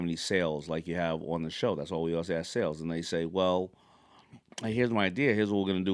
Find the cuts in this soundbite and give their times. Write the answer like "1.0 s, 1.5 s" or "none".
none